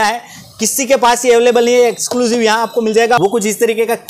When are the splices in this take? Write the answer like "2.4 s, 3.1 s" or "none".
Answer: 3.2 s